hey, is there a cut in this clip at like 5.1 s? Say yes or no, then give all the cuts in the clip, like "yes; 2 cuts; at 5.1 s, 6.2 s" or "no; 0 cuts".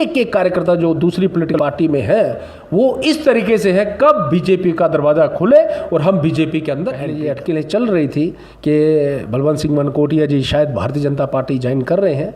no; 2 cuts; at 1.5 s, 7.1 s